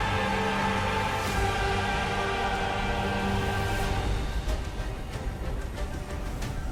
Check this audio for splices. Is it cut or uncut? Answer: uncut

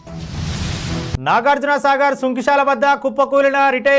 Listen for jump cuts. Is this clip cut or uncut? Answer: cut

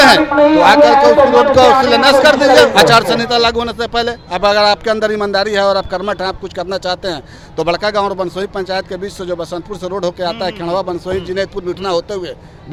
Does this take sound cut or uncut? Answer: uncut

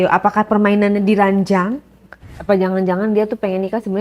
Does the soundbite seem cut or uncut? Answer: cut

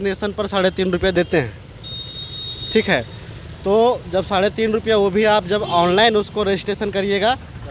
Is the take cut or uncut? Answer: uncut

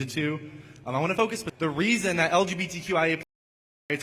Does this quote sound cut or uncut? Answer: cut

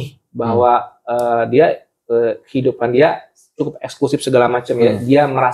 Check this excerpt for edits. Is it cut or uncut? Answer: uncut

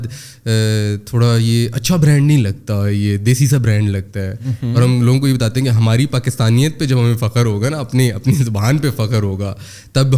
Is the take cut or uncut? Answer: uncut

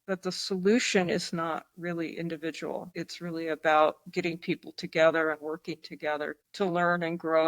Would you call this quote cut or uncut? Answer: cut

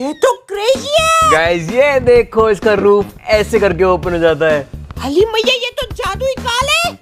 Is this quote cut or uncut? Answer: uncut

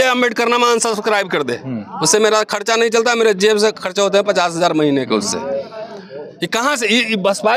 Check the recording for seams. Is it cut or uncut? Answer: uncut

